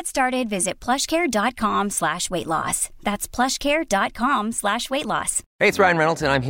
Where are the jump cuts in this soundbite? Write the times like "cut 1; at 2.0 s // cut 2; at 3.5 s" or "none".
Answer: cut 1; at 5.4 s